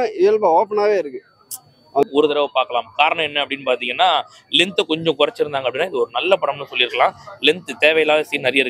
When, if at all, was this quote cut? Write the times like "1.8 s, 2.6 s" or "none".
2.0 s